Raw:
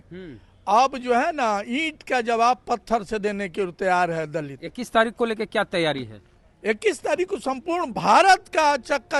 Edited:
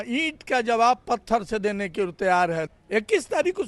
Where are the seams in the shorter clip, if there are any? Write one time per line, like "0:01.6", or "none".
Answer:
0:02.7